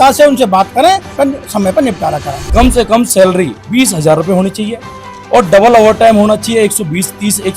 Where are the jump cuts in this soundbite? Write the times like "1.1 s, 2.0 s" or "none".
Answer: 1.1 s, 2.3 s